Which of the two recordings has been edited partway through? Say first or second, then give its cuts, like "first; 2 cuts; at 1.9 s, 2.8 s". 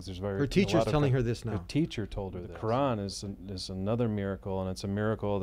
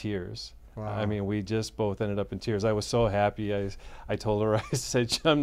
first; 1 cut; at 2.4 s